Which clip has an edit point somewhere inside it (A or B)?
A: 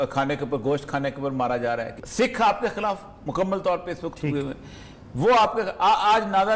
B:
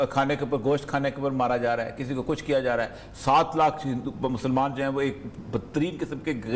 A